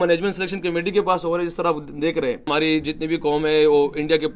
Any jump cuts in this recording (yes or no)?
yes